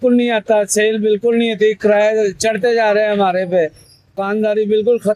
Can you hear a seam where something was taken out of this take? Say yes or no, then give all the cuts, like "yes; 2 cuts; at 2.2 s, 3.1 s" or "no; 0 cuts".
yes; 1 cut; at 4.2 s